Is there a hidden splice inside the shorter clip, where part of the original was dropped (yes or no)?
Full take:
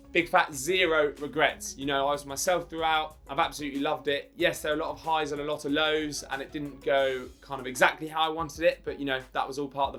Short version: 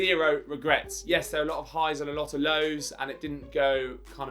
yes